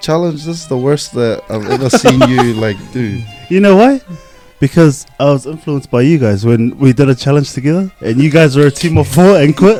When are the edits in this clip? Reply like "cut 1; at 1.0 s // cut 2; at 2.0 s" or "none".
none

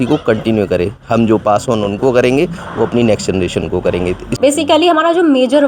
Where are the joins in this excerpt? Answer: cut 1; at 4.3 s

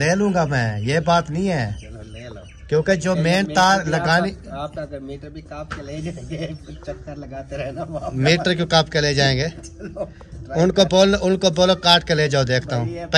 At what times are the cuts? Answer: none

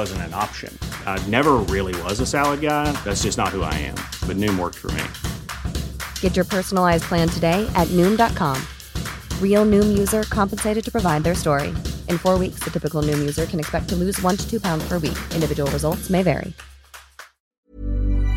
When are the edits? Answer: cut 1; at 17.3 s

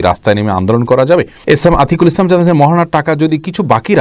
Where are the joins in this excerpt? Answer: cut 1; at 1.4 s

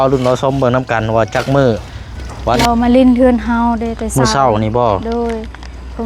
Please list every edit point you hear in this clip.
cut 1; at 2.6 s

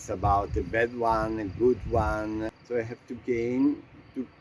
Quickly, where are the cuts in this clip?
cut 1; at 2.5 s

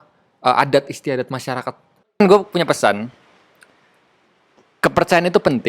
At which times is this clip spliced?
cut 1; at 2.2 s

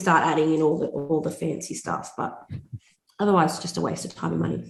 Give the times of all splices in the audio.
none

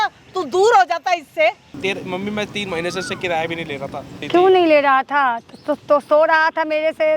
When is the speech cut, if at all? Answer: cut 1; at 1.7 s // cut 2; at 4.2 s

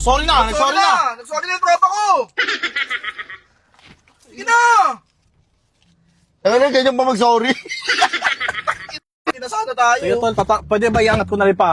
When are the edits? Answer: cut 1; at 9.3 s

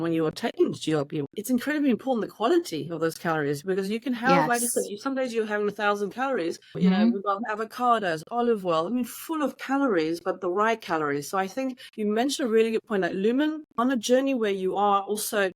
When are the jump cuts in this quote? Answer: cut 1; at 6.8 s // cut 2; at 13.7 s

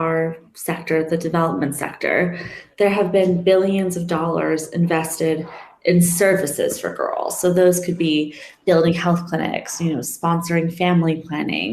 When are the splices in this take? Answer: none

